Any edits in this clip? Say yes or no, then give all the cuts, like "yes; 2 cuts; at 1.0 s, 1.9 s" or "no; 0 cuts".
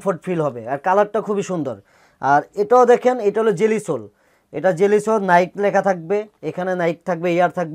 no; 0 cuts